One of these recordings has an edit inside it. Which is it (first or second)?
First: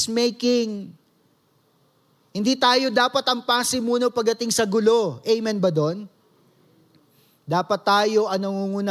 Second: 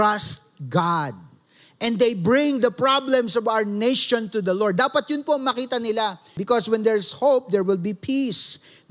second